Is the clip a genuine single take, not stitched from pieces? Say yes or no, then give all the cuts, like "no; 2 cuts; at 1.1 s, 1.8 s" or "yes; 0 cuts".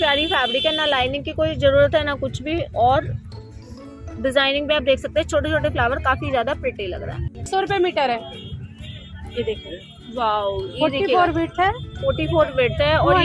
yes; 0 cuts